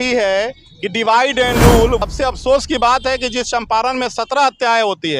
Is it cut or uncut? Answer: cut